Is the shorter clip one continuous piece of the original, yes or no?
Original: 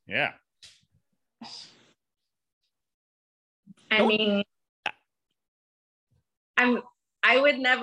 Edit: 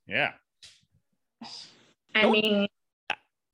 no